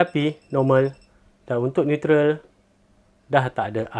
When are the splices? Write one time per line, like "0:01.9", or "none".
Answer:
none